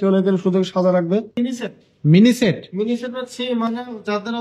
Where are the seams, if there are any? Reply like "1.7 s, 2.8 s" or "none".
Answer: 1.3 s